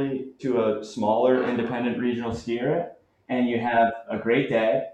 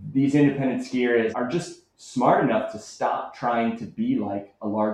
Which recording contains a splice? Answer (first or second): second